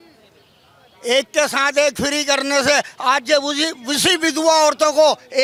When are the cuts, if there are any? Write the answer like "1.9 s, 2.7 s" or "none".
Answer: none